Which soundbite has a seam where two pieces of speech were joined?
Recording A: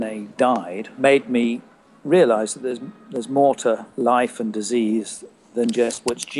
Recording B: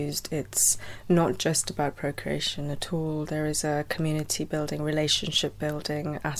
A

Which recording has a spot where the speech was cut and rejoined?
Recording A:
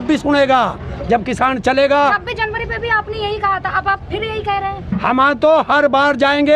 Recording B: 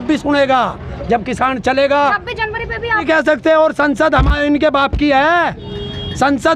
B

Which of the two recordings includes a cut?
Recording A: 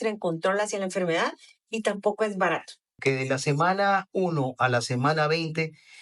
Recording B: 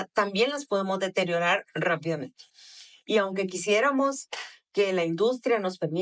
A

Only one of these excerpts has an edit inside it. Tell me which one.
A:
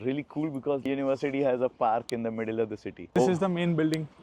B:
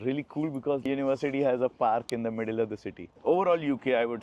A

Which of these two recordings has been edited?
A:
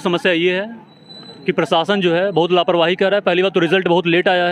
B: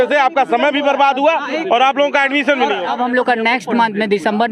B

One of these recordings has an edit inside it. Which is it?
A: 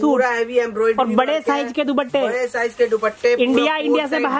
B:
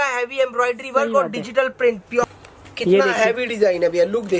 B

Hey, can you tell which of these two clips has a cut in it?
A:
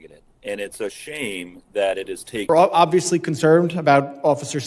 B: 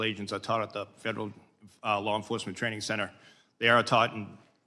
A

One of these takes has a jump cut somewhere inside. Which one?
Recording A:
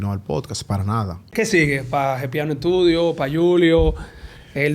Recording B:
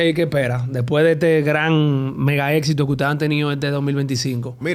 A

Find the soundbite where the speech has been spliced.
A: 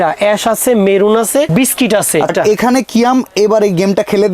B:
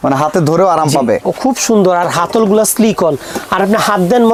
A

